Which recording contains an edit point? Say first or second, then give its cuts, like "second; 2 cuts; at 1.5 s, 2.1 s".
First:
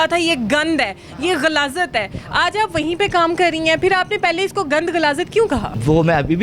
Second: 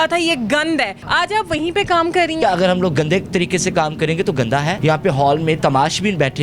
second; 3 cuts; at 1.0 s, 2.4 s, 4.8 s